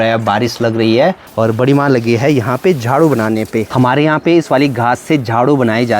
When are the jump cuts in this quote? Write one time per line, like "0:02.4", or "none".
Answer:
0:01.2
0:03.7